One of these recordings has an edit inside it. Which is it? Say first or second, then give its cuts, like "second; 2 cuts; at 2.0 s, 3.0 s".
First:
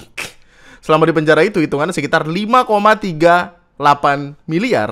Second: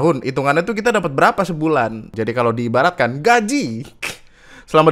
second; 1 cut; at 2.1 s